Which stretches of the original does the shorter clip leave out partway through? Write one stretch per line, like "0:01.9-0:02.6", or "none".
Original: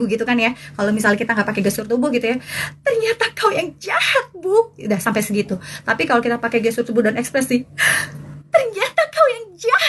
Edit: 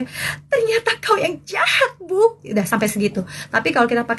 none

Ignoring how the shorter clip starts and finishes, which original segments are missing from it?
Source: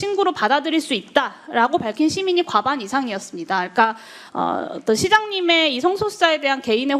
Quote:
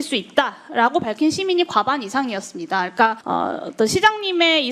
0:04.0-0:04.3

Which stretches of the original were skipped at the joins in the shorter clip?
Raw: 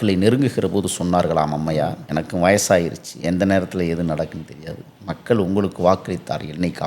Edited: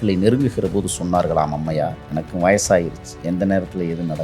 none

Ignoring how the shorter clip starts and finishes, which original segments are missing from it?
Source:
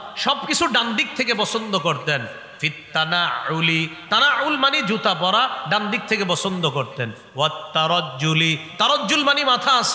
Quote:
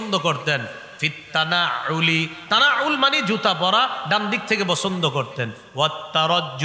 none

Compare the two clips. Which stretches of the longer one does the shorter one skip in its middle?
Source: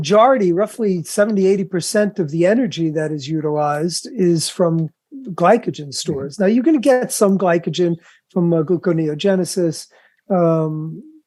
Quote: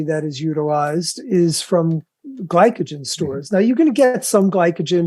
none

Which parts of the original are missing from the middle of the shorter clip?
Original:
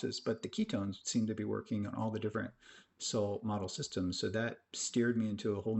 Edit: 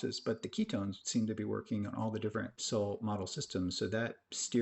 0:02.6-0:03.0

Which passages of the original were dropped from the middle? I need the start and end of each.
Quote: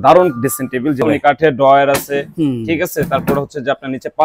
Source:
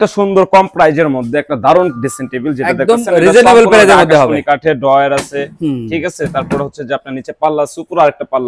0:02.6-0:04.3

